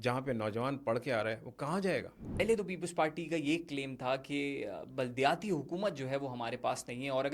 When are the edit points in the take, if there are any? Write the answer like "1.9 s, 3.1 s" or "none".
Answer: 2.4 s